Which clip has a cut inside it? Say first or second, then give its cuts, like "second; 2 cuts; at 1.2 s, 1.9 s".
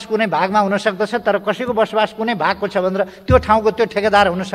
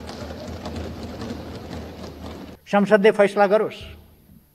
second; 1 cut; at 2.5 s